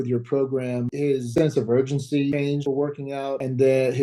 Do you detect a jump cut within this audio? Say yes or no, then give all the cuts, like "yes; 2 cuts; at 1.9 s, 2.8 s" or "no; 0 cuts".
yes; 2 cuts; at 1.2 s, 2.5 s